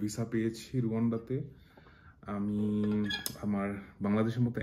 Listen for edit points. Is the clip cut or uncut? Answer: uncut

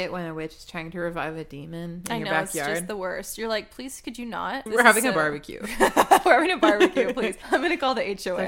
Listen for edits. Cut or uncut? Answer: cut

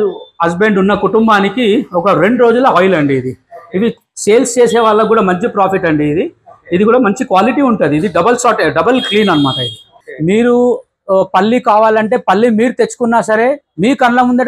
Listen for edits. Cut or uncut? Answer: cut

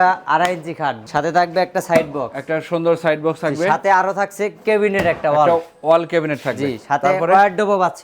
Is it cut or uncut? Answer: cut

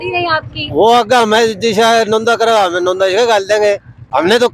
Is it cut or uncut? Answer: uncut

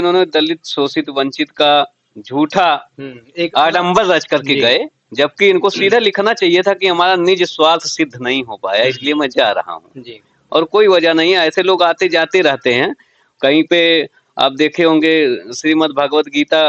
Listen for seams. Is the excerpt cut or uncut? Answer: uncut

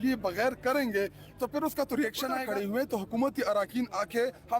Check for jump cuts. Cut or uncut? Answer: cut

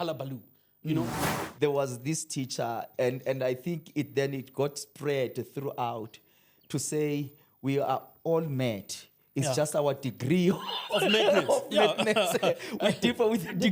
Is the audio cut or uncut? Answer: cut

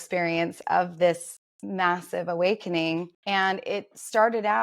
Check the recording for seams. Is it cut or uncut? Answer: cut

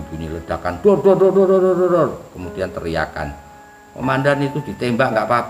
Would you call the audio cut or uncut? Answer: uncut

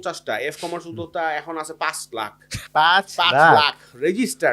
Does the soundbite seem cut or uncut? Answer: uncut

